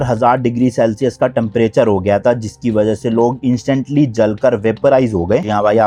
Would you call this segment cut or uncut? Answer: uncut